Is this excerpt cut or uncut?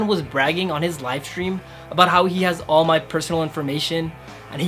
uncut